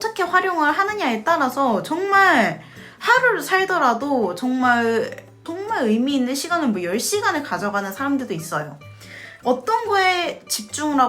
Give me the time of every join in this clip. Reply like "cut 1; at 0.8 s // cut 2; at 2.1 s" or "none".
cut 1; at 5.4 s // cut 2; at 9.2 s